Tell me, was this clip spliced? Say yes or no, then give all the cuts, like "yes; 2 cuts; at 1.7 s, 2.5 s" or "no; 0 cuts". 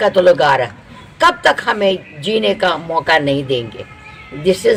no; 0 cuts